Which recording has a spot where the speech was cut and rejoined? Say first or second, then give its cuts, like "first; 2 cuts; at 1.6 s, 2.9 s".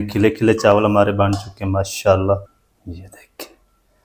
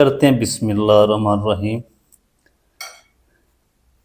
first; 1 cut; at 2.7 s